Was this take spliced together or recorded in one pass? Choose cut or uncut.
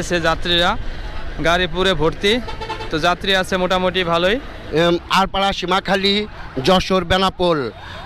cut